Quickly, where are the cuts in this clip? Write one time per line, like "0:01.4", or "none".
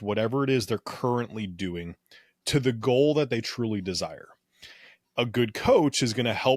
none